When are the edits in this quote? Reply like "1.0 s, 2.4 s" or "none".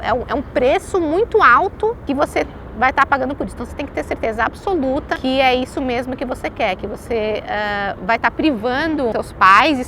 2.0 s, 5.1 s, 9.1 s